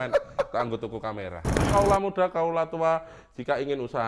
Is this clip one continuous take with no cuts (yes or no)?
no